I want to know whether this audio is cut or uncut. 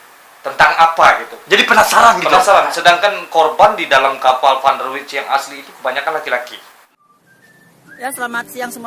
cut